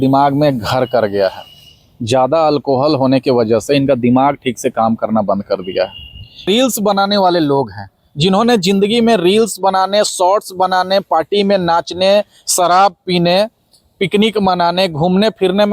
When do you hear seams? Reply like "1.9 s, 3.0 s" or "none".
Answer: 6.4 s